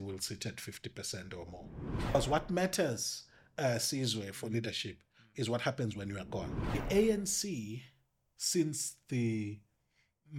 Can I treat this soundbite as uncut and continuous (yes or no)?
no